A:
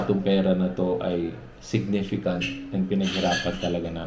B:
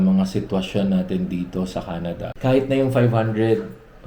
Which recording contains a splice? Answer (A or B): B